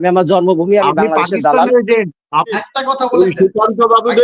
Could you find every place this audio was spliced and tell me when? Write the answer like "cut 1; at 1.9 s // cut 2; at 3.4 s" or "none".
cut 1; at 2.6 s